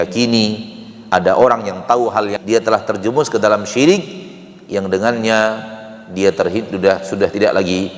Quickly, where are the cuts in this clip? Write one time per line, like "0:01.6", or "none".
0:02.4